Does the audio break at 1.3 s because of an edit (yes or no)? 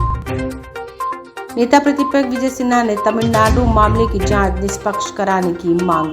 yes